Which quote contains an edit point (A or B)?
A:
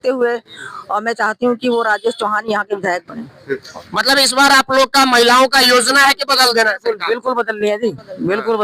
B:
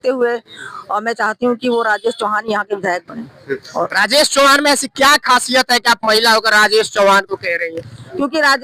A